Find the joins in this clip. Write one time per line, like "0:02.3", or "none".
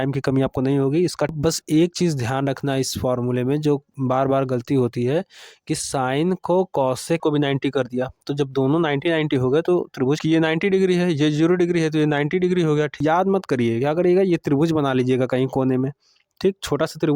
0:01.3
0:07.2
0:10.2
0:12.9